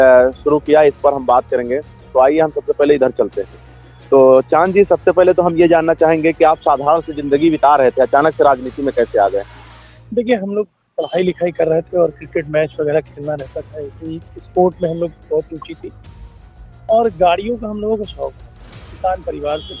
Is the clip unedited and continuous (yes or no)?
yes